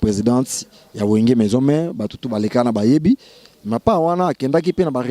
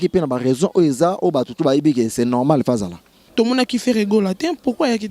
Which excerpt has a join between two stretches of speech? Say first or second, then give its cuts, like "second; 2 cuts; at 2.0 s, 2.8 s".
second; 1 cut; at 3.2 s